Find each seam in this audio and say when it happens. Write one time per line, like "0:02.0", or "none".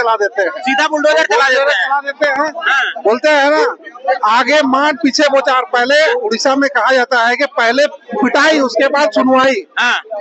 none